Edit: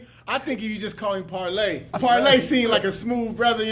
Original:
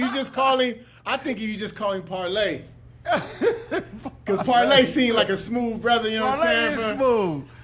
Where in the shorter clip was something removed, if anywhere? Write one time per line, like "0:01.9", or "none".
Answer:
0:02.0

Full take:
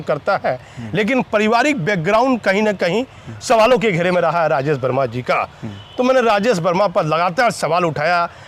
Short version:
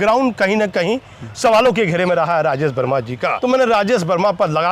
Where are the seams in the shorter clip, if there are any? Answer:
0:03.3

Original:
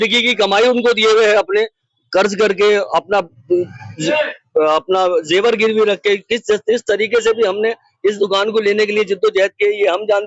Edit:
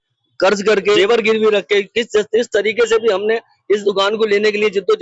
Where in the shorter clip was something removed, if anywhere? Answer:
0:01.0

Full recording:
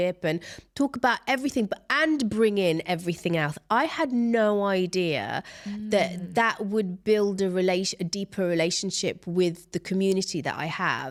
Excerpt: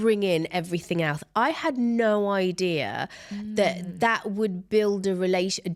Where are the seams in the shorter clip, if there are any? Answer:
none

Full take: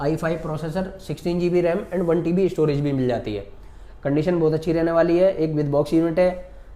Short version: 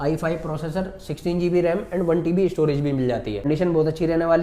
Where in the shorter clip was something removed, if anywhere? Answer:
0:03.4

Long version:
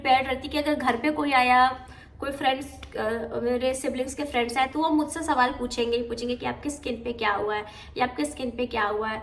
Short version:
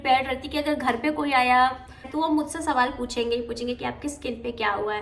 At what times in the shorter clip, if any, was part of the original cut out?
0:02.1

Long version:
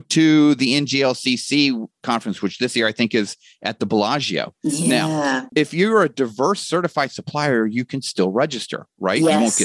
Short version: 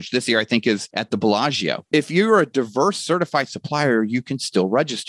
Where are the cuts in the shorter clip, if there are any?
0:00.9
0:01.8

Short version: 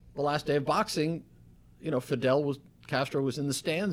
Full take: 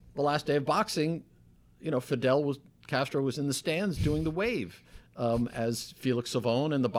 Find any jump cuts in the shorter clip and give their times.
none

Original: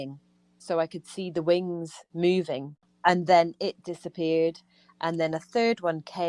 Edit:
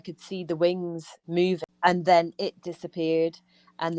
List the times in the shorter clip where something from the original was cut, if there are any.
0:01.7

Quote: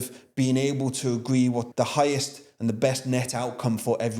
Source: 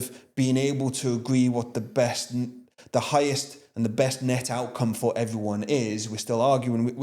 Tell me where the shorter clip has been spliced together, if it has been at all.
0:01.7

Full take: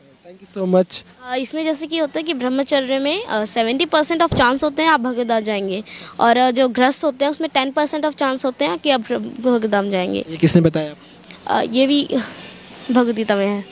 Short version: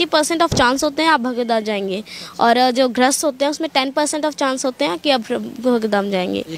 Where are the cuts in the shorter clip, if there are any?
none

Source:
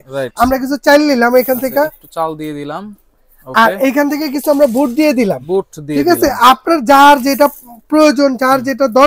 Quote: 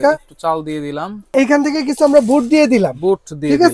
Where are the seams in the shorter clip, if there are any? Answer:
0:01.3

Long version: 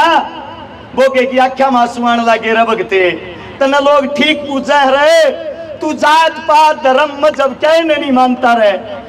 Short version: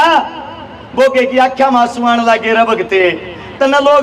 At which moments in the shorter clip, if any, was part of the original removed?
none

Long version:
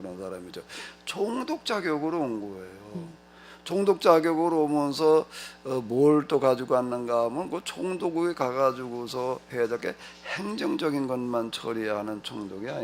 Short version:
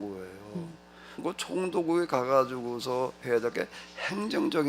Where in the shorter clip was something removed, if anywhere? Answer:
0:01.2

